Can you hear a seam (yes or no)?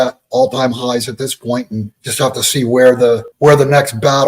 yes